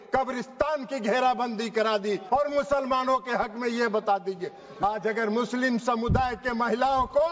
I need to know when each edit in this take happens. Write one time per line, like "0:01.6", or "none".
0:02.2
0:04.8

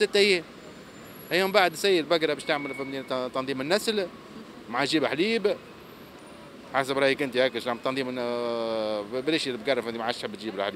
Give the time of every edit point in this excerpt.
none

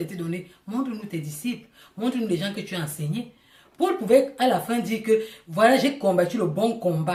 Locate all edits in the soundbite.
none

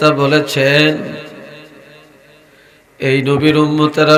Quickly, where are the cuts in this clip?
none

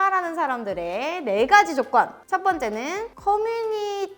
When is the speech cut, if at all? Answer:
none

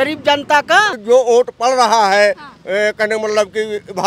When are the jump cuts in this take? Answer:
0:00.9

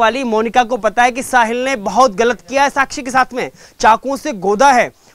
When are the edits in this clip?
none

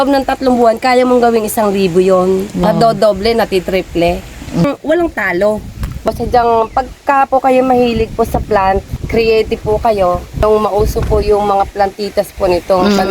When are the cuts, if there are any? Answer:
0:02.6
0:04.6
0:06.1
0:08.9
0:10.4

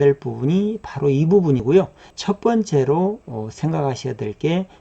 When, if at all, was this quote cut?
0:01.6

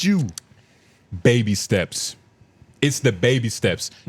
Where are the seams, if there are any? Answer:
none

